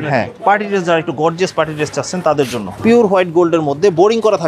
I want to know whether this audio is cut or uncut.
cut